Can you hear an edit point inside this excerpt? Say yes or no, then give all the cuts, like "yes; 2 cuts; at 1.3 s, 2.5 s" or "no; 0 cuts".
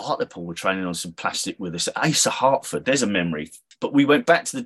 yes; 1 cut; at 3.7 s